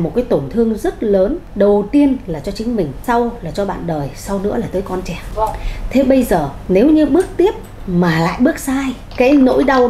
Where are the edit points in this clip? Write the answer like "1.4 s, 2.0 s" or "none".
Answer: 1.4 s, 3.0 s, 5.2 s, 6.6 s, 9.0 s